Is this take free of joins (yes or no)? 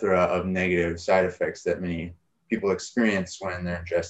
yes